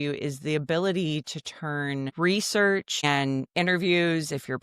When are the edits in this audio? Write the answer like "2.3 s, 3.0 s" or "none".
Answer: 2.1 s, 3.0 s